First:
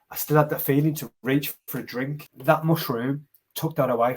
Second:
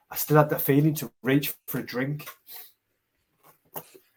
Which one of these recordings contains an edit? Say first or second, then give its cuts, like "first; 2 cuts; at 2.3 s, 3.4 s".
first; 1 cut; at 2.3 s